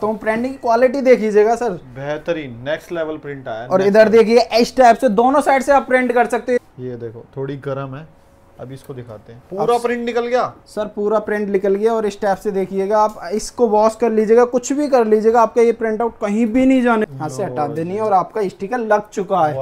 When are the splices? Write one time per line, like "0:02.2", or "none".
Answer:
0:06.6
0:17.0